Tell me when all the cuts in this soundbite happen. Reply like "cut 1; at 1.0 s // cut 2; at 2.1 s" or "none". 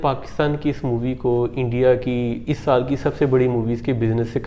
none

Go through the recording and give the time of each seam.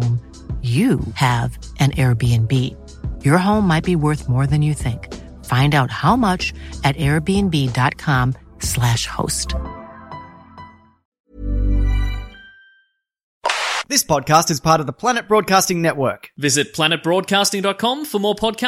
cut 1; at 11.2 s // cut 2; at 13.5 s

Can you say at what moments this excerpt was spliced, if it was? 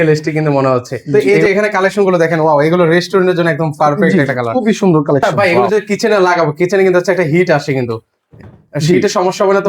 cut 1; at 1.2 s // cut 2; at 5.3 s

